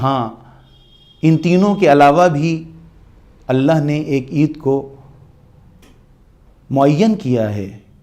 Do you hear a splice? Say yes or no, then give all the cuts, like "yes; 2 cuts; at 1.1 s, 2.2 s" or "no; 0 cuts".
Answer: no; 0 cuts